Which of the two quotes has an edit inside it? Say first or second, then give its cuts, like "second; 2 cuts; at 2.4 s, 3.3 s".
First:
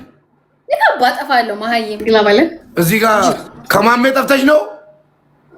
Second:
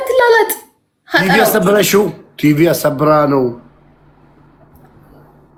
first; 3 cuts; at 1.9 s, 2.6 s, 3.5 s